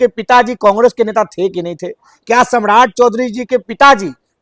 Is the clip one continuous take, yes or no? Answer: yes